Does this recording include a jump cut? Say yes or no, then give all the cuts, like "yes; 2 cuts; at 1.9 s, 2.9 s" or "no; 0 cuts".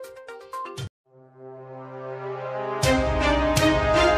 no; 0 cuts